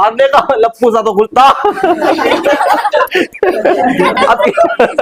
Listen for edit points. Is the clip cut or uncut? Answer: uncut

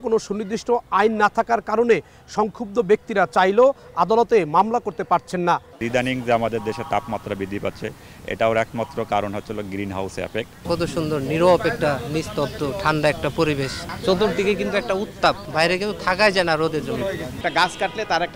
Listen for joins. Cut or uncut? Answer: cut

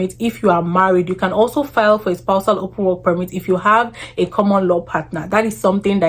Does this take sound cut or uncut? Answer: uncut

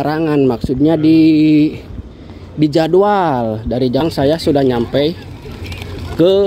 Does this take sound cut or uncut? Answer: cut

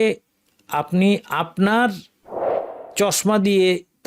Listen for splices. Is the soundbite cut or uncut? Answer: uncut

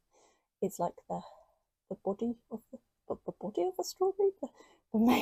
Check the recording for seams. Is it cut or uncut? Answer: uncut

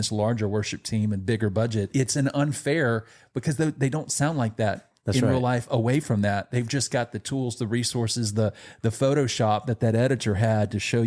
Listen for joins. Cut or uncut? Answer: uncut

